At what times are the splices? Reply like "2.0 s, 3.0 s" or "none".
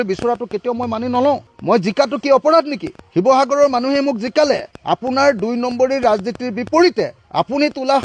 none